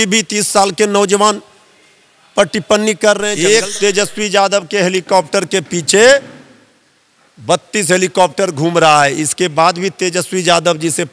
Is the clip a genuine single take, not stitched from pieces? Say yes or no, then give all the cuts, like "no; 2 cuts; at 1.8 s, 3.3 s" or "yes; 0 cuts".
no; 1 cut; at 3.3 s